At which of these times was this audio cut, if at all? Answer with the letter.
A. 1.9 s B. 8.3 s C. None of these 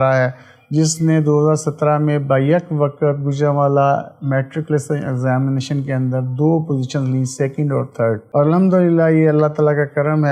C